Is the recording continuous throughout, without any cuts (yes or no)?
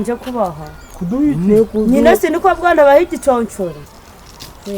no